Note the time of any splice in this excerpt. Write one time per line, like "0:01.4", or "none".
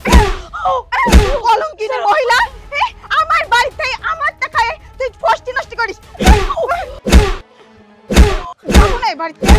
0:06.9
0:08.5